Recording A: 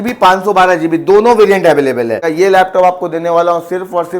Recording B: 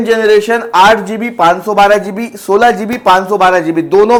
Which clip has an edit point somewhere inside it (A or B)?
A